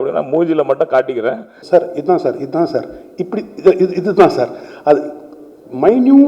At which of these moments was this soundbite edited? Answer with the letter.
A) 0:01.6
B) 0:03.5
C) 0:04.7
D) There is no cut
A